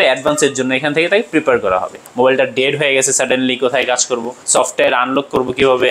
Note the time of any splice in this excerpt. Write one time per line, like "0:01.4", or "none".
0:02.0
0:04.4